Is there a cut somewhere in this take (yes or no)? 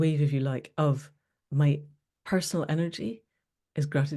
no